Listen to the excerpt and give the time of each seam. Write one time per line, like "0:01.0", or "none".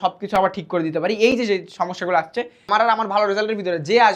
0:02.6